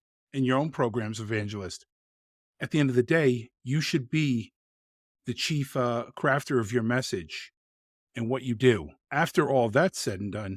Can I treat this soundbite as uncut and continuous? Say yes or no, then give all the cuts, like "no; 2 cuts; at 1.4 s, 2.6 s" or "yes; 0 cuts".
no; 1 cut; at 9.0 s